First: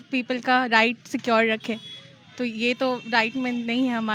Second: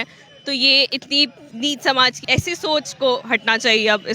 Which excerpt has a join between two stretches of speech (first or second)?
second